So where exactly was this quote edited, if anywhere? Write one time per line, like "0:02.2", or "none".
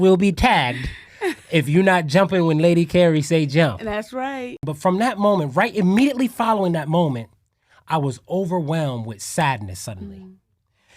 0:04.7